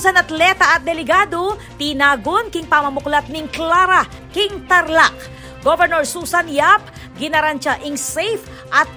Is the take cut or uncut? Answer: uncut